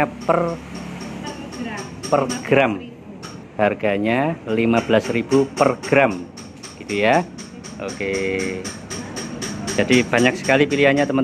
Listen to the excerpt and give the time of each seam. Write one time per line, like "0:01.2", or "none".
none